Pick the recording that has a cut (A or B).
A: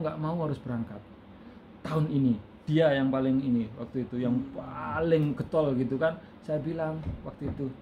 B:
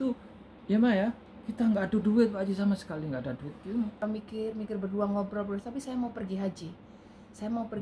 B